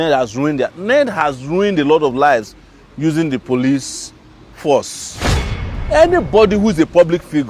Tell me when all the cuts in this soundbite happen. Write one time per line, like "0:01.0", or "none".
0:05.5